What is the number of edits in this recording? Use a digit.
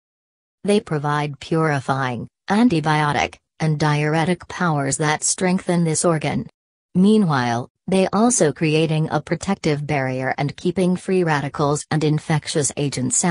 1